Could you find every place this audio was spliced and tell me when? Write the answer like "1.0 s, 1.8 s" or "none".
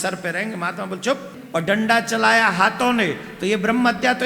1.3 s